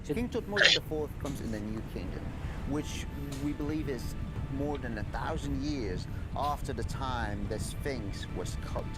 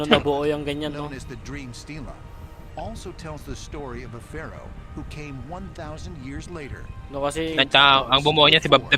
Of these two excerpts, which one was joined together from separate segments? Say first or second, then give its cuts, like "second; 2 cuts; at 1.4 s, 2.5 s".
first; 1 cut; at 4.4 s